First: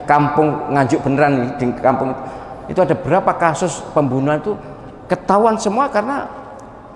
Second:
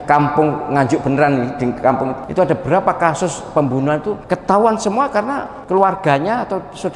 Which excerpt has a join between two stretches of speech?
second; 3 cuts; at 2.2 s, 4.2 s, 5.5 s

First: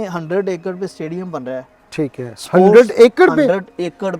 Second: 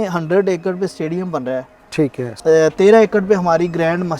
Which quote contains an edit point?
second; 1 cut; at 2.3 s

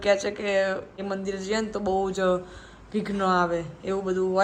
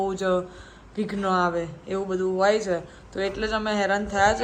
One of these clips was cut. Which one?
first; 1 cut; at 1.0 s

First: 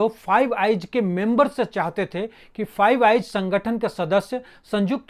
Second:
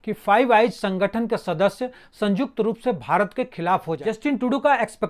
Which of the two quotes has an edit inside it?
second; 1 cut; at 4.1 s

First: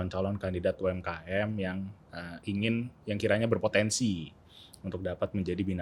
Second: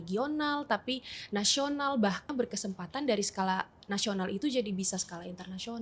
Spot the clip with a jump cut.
second; 1 cut; at 2.3 s

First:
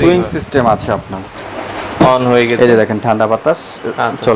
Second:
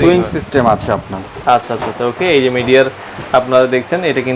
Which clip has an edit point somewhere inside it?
first; 1 cut; at 1.3 s

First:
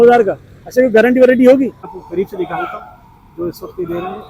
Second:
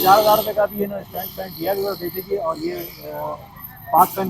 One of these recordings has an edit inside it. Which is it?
first; 1 cut; at 1.9 s

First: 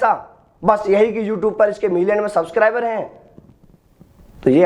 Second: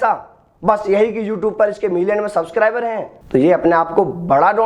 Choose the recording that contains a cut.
second; 1 cut; at 3.1 s

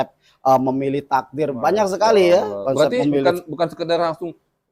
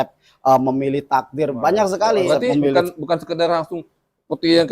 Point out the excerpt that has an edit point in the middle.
second; 1 cut; at 2.2 s

